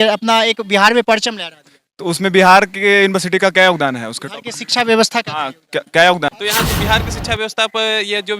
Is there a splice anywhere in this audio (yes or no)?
yes